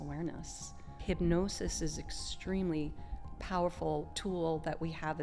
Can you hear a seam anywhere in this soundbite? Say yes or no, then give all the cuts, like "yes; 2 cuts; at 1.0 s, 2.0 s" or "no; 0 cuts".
yes; 2 cuts; at 1.0 s, 4.1 s